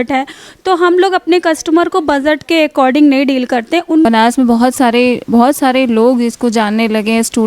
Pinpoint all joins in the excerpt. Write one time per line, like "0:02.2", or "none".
0:04.1